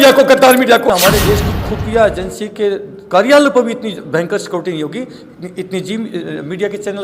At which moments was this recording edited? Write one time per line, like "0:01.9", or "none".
0:01.3